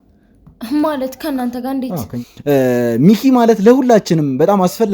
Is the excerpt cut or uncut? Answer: cut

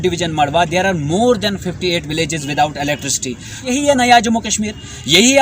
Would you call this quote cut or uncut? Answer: cut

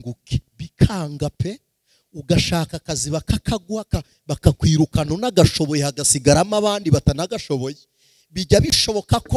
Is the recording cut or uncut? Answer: uncut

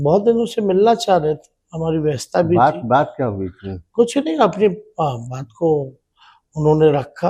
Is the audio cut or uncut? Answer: uncut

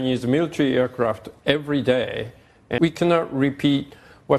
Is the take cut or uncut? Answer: cut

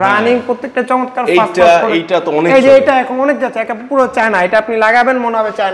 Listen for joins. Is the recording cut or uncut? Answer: uncut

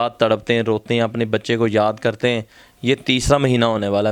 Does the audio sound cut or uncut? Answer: uncut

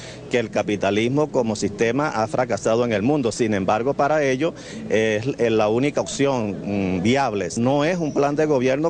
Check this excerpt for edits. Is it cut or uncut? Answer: uncut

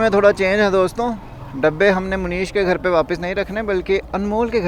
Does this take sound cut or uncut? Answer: uncut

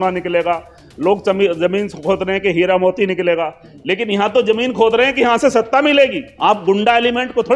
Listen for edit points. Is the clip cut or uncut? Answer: cut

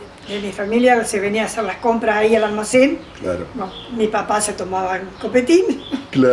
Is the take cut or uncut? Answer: uncut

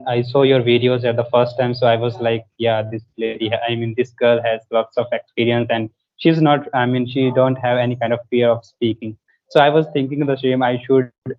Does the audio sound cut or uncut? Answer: uncut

